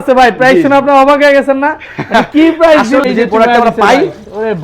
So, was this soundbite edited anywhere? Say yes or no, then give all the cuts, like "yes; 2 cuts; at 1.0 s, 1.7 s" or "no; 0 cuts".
yes; 1 cut; at 3.0 s